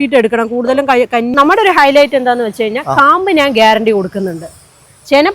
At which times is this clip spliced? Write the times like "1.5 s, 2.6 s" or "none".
1.3 s